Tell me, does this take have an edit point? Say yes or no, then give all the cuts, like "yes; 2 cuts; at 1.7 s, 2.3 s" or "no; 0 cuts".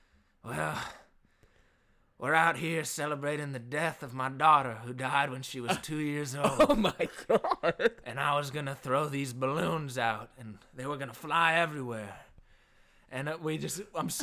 no; 0 cuts